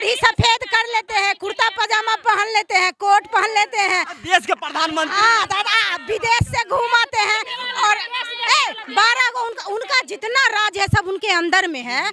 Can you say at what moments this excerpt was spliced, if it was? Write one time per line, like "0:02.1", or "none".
none